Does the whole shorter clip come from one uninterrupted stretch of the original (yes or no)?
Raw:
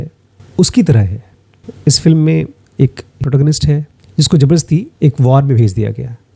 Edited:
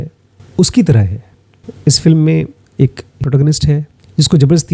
yes